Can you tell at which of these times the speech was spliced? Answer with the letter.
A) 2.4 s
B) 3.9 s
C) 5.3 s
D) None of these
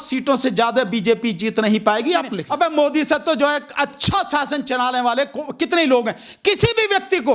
A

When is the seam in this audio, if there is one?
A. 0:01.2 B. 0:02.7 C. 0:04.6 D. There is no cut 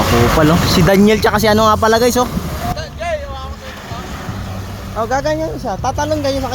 B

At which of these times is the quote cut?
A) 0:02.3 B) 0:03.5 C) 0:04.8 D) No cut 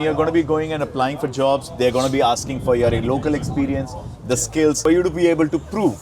C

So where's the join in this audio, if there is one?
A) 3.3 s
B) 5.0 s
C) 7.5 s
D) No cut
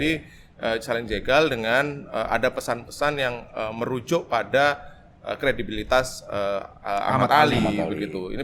D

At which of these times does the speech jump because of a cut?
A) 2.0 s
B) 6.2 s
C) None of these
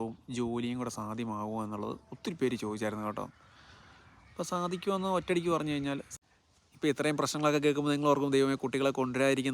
B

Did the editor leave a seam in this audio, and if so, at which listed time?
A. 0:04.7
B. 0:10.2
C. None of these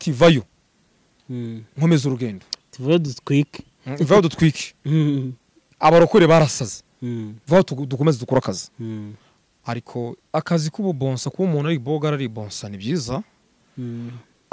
B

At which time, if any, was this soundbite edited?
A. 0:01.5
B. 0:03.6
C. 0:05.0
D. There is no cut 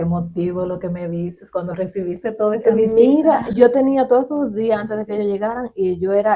D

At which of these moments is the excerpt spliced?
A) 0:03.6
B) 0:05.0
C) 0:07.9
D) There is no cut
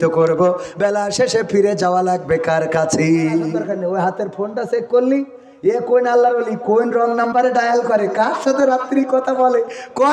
A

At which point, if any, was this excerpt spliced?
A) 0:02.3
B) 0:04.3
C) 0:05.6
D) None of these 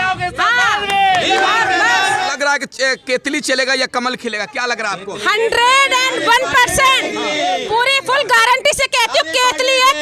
A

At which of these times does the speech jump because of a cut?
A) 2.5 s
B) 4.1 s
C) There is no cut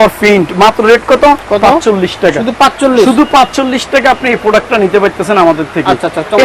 C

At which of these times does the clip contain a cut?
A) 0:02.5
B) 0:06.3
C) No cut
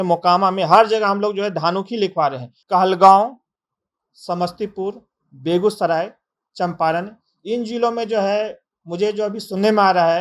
A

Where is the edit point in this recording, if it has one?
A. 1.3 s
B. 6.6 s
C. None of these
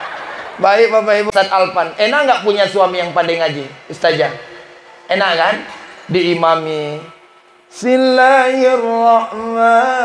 A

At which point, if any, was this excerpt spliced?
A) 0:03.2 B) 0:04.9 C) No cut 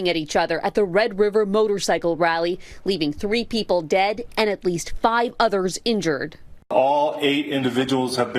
C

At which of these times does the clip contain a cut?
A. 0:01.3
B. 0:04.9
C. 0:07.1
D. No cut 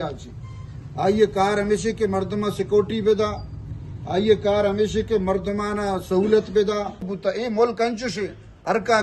C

